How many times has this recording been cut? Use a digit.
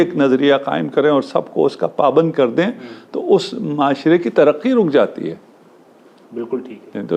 0